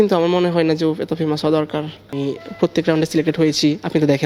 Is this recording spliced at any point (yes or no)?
yes